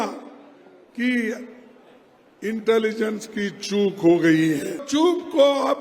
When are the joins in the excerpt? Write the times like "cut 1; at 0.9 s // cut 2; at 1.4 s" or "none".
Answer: cut 1; at 4.8 s